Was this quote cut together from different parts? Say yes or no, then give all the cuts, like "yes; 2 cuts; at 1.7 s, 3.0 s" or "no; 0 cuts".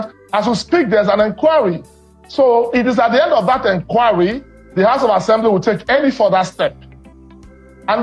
no; 0 cuts